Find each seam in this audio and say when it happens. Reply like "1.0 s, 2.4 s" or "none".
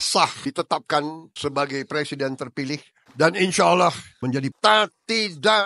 3.0 s, 4.4 s